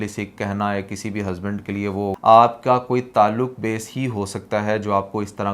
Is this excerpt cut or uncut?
cut